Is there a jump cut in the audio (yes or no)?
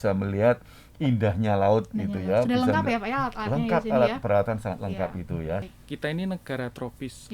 yes